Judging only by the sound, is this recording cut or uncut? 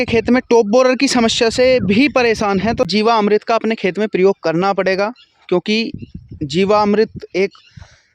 cut